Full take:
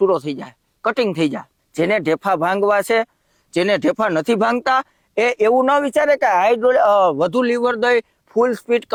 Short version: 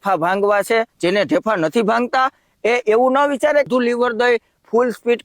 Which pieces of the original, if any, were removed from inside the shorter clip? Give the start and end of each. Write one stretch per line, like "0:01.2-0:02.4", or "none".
0:03.1-0:03.5
0:06.2-0:07.3